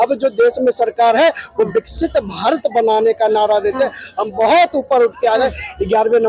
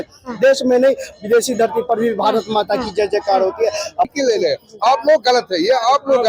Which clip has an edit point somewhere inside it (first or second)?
second